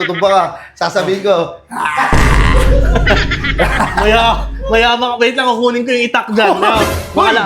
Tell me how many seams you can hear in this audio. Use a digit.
0